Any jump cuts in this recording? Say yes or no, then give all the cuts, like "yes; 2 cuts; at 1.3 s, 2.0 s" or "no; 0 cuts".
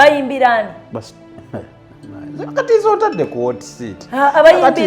no; 0 cuts